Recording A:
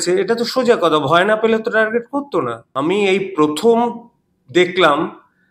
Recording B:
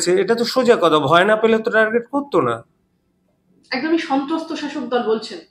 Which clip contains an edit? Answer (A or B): A